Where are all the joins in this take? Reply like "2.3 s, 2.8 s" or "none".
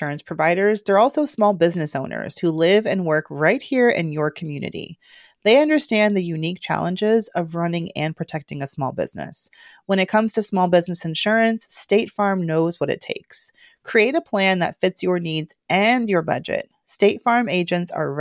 none